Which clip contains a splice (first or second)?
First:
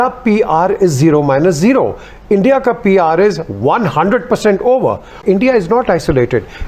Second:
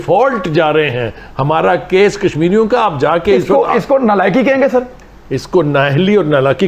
first